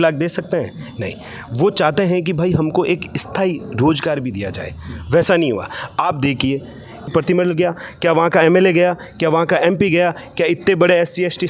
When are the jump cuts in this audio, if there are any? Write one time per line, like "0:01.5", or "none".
0:07.1